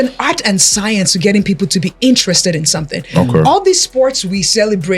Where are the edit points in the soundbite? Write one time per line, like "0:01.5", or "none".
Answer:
none